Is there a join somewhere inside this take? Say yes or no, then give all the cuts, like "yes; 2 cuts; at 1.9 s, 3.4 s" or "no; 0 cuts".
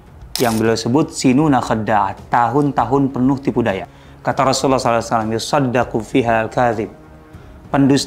yes; 1 cut; at 3.9 s